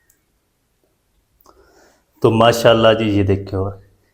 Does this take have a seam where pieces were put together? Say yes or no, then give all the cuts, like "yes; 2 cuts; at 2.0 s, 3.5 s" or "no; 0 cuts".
yes; 1 cut; at 1.3 s